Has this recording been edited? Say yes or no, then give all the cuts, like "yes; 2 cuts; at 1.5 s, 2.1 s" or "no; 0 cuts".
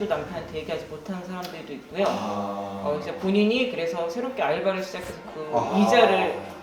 no; 0 cuts